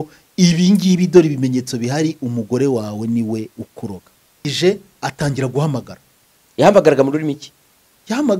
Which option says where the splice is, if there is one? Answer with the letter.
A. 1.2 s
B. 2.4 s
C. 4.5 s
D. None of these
C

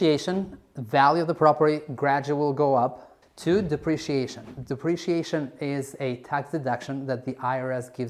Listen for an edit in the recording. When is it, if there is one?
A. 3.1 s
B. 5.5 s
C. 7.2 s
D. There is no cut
A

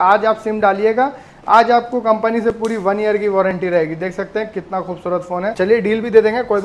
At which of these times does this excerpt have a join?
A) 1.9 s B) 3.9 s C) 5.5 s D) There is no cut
C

